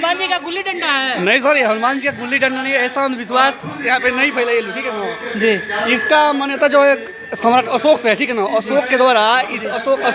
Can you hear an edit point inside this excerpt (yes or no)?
no